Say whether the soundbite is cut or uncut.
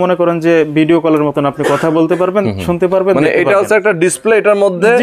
uncut